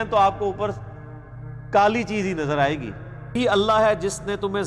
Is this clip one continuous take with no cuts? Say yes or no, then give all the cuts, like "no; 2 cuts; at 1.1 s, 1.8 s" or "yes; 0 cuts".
no; 1 cut; at 3.4 s